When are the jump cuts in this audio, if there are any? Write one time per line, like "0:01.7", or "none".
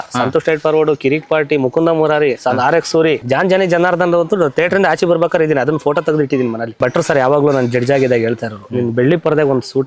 0:03.2
0:06.8